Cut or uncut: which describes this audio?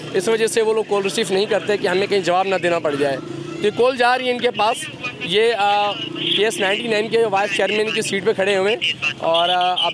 uncut